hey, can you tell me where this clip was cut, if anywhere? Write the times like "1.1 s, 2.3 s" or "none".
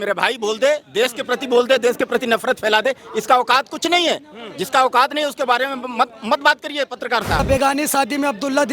7.4 s